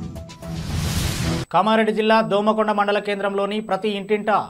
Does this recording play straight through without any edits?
no; 1 cut; at 1.5 s

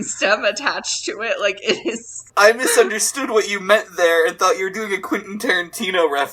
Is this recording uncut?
no; 1 cut; at 2.3 s

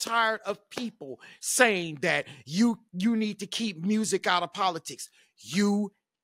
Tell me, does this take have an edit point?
no; 0 cuts

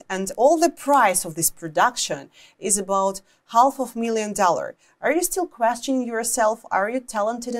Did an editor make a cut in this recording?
no; 0 cuts

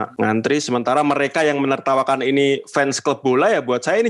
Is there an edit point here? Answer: no; 0 cuts

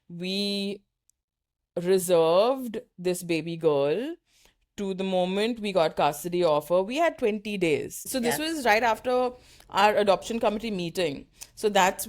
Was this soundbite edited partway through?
yes; 1 cut; at 8.0 s

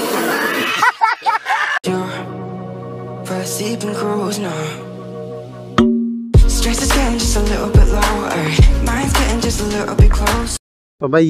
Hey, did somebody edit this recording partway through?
no; 0 cuts

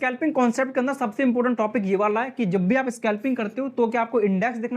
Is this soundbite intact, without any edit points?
yes; 0 cuts

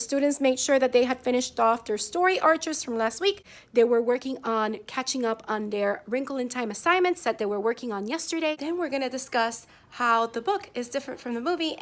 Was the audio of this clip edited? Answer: yes; 2 cuts; at 3.5 s, 8.6 s

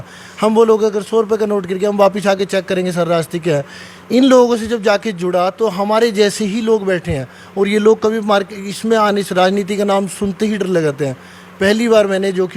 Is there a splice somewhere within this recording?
no; 0 cuts

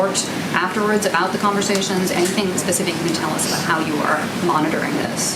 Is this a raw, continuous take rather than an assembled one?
yes; 0 cuts

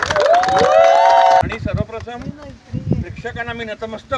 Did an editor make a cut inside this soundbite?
yes; 1 cut; at 1.4 s

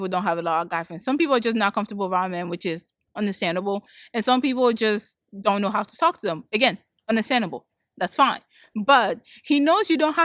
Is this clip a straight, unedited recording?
yes; 0 cuts

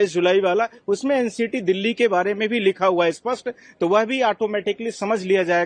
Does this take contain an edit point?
no; 0 cuts

